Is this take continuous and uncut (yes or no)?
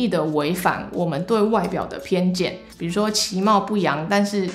no